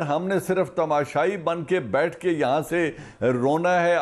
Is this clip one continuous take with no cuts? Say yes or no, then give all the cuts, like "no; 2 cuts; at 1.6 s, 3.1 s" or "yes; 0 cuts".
yes; 0 cuts